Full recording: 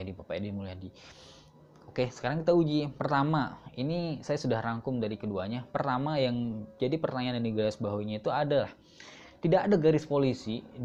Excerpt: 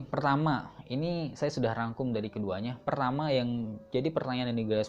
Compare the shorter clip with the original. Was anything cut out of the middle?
no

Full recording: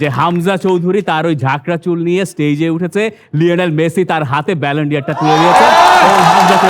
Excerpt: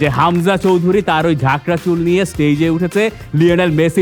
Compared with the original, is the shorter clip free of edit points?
yes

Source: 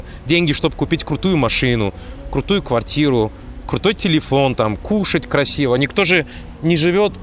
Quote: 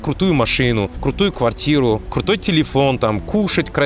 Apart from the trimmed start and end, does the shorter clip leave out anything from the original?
yes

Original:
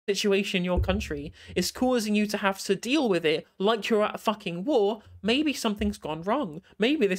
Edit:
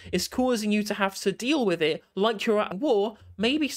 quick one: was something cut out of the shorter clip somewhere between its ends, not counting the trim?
yes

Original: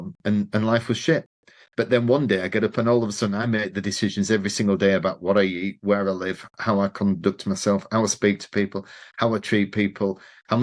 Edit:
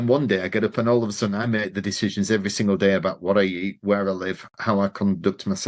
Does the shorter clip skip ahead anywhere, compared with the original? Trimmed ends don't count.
no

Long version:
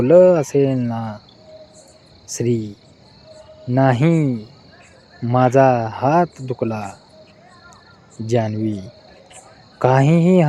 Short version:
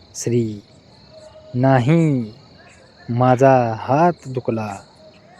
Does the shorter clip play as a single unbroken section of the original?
yes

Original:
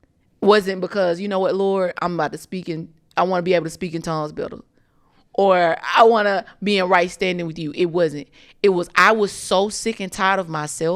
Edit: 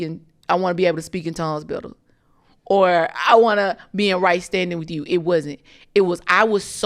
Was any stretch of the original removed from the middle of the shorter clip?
no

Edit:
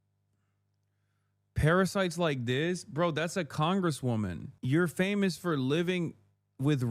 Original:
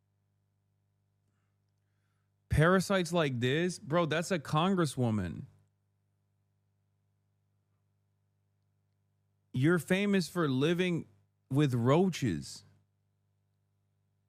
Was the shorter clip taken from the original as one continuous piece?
no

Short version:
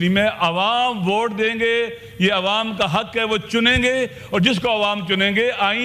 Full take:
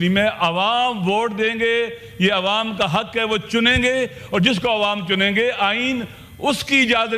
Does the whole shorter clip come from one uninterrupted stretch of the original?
yes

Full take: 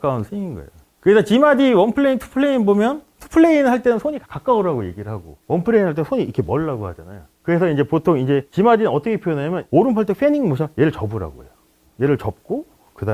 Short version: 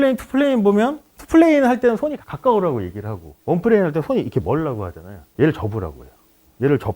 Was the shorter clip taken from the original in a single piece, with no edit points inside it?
no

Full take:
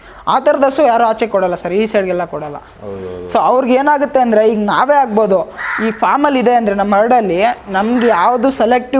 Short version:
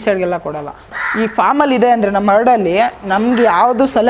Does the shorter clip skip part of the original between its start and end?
yes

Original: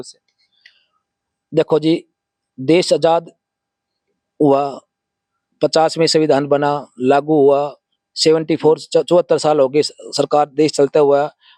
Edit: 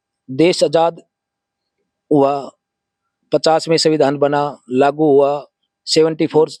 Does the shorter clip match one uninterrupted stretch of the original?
yes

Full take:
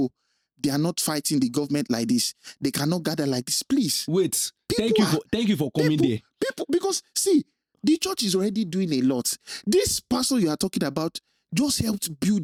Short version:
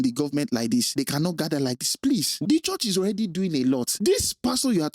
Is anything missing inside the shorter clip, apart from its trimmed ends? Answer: yes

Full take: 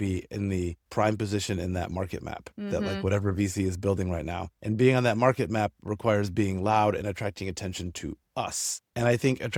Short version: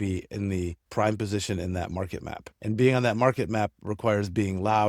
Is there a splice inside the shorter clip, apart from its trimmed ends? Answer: yes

